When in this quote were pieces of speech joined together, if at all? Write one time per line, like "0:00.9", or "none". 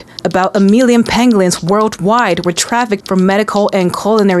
0:03.0